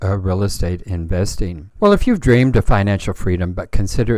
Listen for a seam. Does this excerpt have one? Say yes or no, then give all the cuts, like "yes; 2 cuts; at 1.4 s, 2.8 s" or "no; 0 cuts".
yes; 1 cut; at 1.6 s